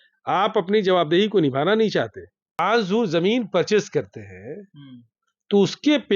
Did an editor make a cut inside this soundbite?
yes; 1 cut; at 2.6 s

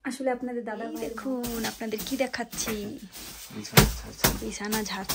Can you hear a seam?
yes; 1 cut; at 0.9 s

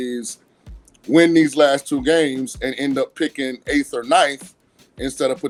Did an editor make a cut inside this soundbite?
no; 0 cuts

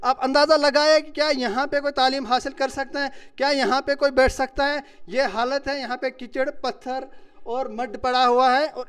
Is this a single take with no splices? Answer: yes; 0 cuts

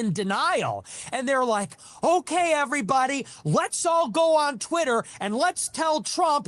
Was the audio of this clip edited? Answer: no; 0 cuts

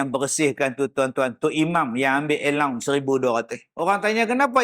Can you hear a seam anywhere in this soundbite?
yes; 1 cut; at 3.6 s

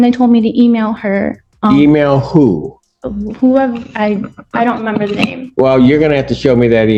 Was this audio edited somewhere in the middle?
no; 0 cuts

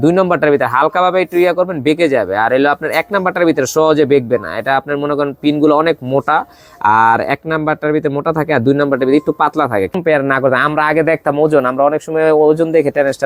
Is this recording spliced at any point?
no; 0 cuts

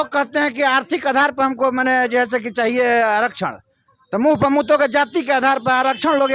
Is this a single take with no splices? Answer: yes; 0 cuts

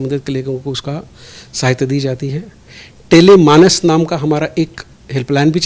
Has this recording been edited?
no; 0 cuts

